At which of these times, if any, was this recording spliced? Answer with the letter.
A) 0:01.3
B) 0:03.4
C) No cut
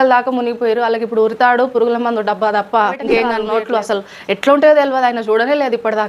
B